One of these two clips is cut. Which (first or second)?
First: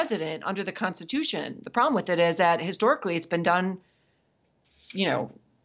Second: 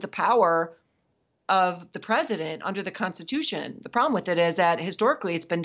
second